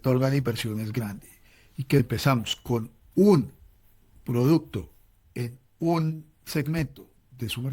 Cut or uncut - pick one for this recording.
cut